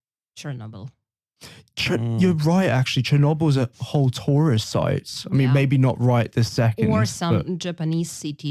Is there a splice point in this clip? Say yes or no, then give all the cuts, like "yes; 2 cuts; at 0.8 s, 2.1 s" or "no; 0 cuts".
no; 0 cuts